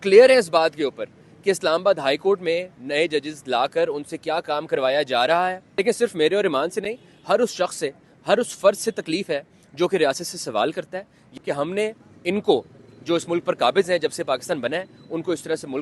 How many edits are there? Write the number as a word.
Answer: two